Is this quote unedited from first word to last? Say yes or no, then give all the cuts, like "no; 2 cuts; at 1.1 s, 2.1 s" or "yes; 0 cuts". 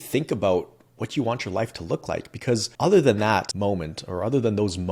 no; 2 cuts; at 2.7 s, 3.5 s